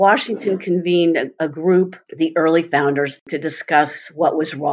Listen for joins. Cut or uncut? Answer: cut